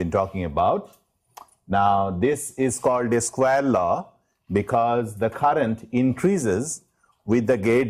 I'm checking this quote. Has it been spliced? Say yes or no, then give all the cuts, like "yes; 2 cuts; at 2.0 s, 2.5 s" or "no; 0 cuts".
yes; 1 cut; at 3.9 s